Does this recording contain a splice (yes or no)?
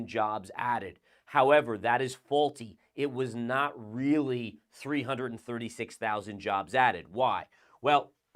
no